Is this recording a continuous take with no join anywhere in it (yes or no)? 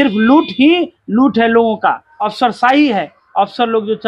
no